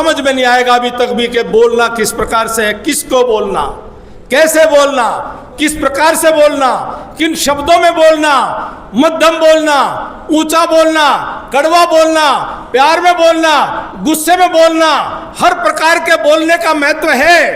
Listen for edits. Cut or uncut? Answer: uncut